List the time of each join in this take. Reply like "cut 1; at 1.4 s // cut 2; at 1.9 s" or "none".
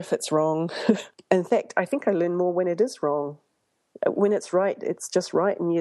cut 1; at 1.1 s